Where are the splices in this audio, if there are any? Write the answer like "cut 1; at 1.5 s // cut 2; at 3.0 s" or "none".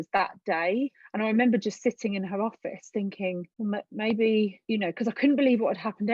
cut 1; at 1.0 s // cut 2; at 3.5 s // cut 3; at 4.6 s